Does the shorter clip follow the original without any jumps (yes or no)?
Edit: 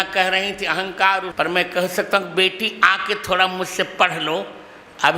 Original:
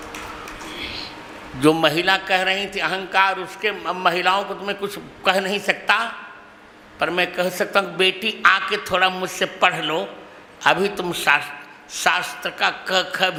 no